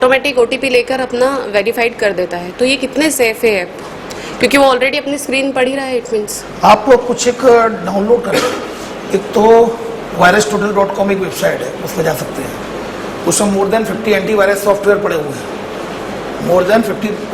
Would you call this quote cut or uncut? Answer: uncut